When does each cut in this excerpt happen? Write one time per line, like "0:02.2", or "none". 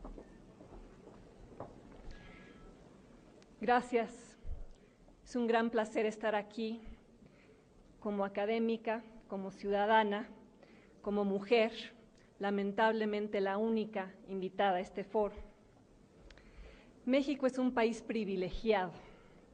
none